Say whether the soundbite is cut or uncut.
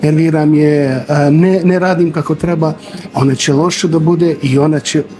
uncut